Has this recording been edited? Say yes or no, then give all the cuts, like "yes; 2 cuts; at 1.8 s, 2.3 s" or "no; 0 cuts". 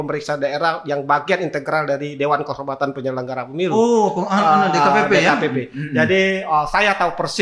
no; 0 cuts